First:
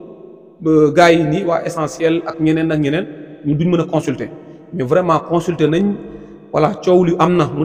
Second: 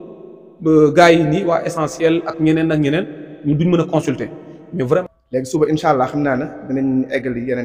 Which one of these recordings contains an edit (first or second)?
second